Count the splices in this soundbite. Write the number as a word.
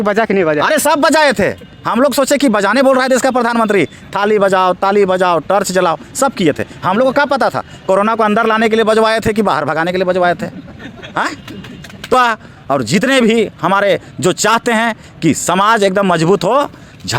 one